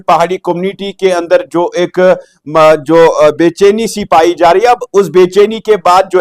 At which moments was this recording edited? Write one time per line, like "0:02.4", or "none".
none